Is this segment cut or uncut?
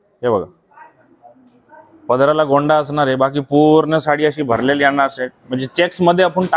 uncut